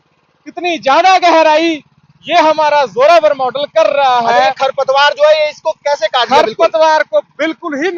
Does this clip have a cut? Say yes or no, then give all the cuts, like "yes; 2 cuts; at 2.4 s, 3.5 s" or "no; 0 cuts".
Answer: no; 0 cuts